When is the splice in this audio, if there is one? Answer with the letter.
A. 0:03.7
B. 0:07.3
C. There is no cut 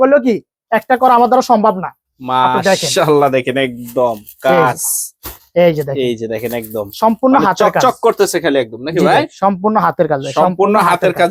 C